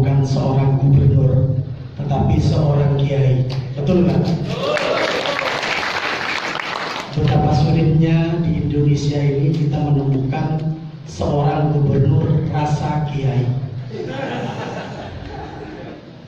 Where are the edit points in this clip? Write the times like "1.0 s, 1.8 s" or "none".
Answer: none